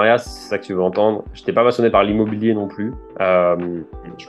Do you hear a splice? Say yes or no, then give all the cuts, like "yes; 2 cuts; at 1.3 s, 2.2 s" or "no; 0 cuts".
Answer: no; 0 cuts